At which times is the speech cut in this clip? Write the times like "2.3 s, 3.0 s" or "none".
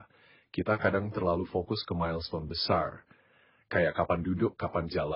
none